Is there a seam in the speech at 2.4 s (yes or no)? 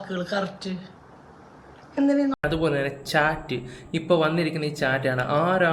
yes